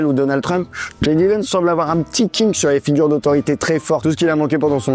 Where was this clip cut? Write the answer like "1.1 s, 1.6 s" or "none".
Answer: 4.0 s